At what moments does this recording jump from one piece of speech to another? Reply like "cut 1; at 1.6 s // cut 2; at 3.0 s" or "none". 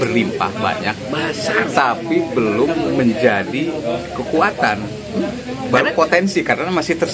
none